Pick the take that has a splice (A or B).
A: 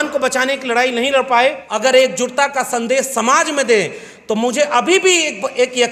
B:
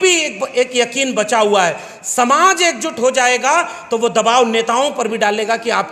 A